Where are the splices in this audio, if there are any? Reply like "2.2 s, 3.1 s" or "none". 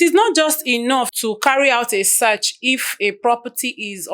1.1 s